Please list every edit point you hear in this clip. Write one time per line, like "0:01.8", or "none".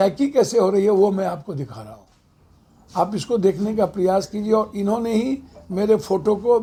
none

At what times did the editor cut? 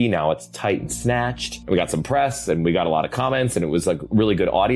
0:01.5

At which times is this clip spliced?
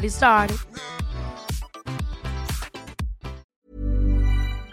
0:03.5

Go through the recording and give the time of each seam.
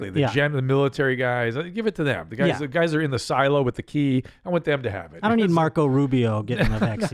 none

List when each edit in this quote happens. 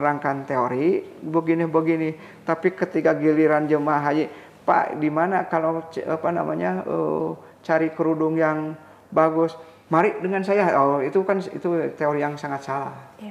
none

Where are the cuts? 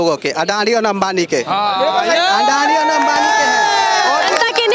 none

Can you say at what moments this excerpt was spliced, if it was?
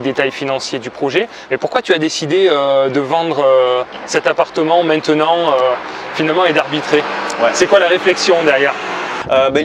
none

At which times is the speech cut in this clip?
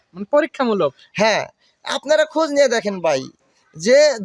none

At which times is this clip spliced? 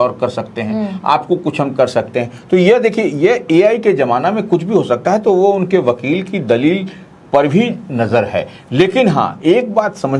none

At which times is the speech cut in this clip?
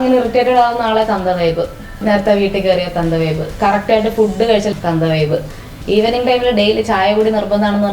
0:02.0
0:04.7

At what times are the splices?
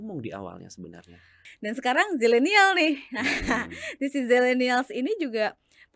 0:01.4

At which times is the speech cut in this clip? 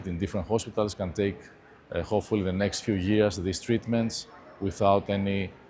none

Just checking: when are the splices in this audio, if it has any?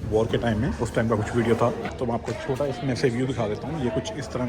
0:01.9

